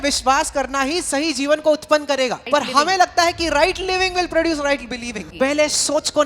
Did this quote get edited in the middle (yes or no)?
yes